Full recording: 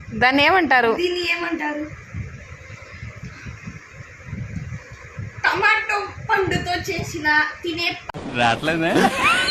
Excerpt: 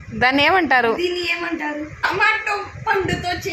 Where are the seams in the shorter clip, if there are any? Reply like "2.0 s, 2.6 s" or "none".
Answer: 2.1 s